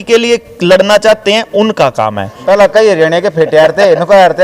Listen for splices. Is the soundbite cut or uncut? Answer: cut